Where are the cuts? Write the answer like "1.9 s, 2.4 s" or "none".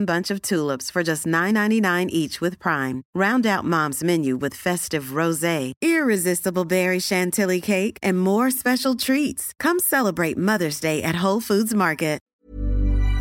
12.3 s